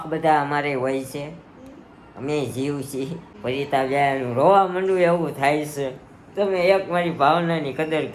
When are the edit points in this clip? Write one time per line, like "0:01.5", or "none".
0:03.2